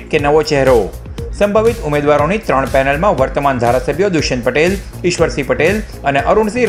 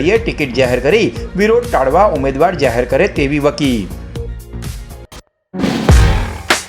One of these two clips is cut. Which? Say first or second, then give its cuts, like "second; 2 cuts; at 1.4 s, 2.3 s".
second; 1 cut; at 5.1 s